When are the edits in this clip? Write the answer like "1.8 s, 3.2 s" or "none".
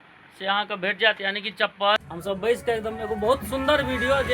2.0 s